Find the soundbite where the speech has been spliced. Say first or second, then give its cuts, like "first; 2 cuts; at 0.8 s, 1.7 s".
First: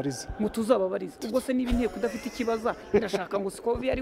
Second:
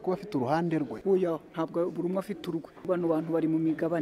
second; 2 cuts; at 0.9 s, 2.8 s